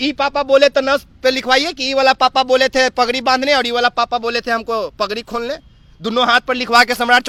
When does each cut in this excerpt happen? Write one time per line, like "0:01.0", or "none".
none